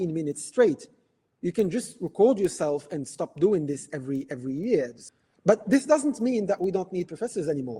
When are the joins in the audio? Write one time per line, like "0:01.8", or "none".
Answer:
0:05.0